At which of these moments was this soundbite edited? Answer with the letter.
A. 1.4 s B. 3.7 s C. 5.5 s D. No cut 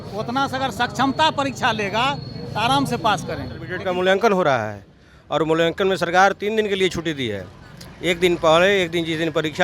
B